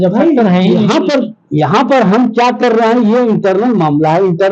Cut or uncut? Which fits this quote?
uncut